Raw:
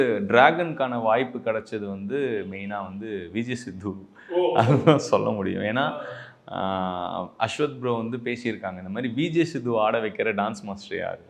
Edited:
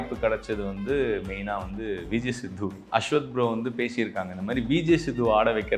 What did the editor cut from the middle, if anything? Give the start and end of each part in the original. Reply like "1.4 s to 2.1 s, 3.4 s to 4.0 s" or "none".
4.1 s to 7.3 s

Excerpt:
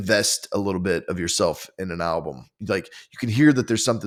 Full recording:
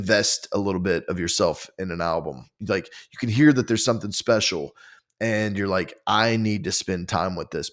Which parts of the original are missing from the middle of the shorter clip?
none

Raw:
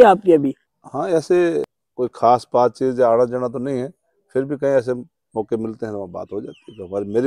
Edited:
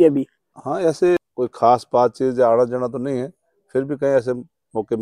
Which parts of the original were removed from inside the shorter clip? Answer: 1.5 s to 1.8 s

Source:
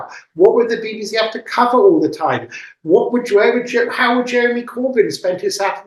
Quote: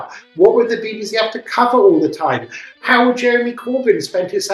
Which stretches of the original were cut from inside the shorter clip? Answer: 2.8 s to 3.9 s

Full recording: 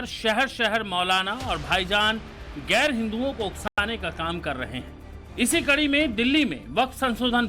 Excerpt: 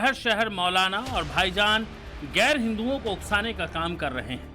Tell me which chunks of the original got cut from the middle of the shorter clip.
3.6 s to 3.7 s

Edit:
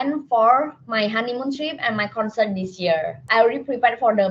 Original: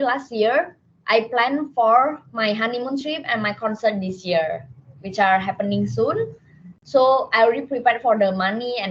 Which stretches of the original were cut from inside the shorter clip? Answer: 4.7 s to 7.3 s

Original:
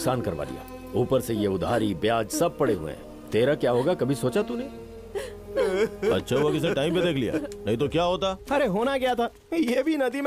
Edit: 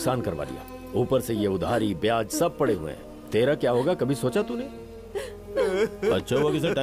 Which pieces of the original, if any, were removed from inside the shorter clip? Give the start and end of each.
none

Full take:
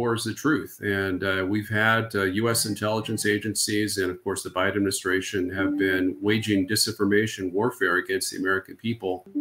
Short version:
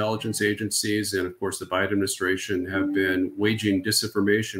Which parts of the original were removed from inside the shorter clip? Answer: none

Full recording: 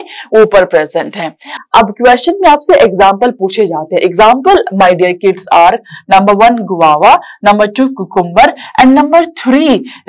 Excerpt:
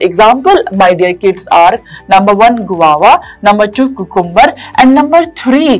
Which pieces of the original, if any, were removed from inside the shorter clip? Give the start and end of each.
none

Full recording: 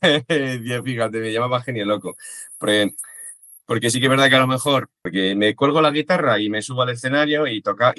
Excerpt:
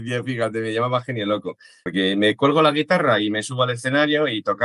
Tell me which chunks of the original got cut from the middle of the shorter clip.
2.4 s to 5.0 s

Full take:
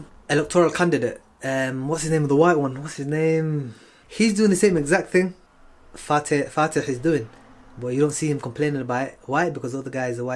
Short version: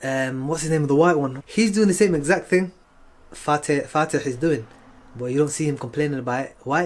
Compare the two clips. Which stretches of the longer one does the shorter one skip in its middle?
2.8 s to 4.0 s

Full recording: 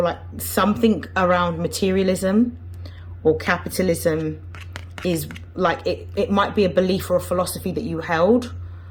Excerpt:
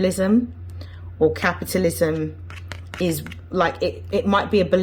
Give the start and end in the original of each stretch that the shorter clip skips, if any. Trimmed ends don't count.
none

